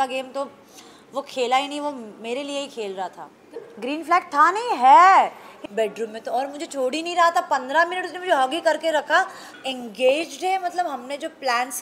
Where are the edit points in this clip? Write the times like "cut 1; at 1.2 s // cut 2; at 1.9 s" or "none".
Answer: cut 1; at 3.6 s // cut 2; at 5.5 s // cut 3; at 9.4 s